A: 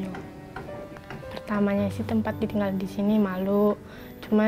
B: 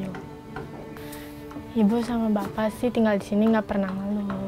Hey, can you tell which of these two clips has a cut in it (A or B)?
A